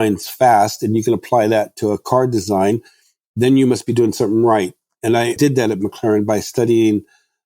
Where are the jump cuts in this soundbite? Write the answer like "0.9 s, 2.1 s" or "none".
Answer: 5.0 s

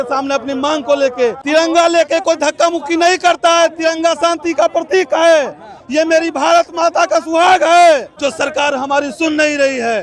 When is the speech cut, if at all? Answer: 1.4 s, 8.1 s

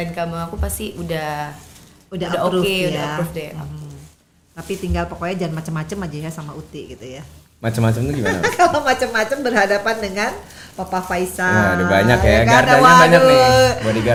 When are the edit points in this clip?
none

